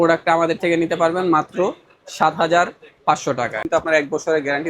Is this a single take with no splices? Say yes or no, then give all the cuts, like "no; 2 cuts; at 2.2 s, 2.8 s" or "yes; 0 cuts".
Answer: no; 1 cut; at 3.7 s